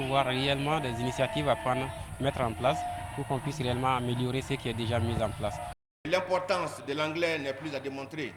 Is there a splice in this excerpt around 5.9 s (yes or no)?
yes